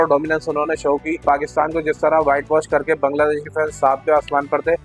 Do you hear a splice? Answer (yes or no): yes